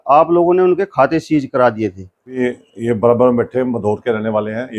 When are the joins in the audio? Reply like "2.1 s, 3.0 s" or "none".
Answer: 2.4 s